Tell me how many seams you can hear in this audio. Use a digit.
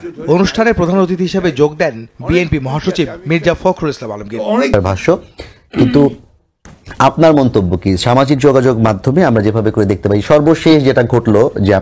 1